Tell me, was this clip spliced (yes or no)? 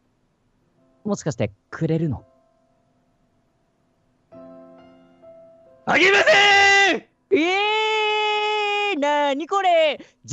yes